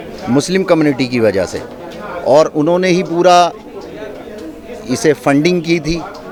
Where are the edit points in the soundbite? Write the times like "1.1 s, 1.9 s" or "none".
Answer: none